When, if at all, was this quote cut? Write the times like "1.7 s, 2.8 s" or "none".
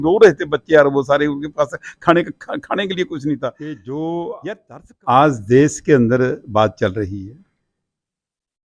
3.7 s